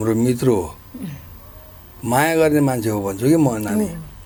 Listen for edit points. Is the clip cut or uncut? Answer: uncut